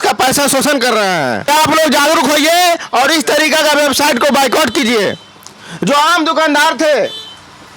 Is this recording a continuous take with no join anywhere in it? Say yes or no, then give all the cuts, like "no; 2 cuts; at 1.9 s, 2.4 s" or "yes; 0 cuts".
no; 1 cut; at 1.5 s